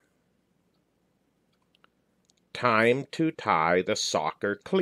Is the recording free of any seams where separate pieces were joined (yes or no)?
no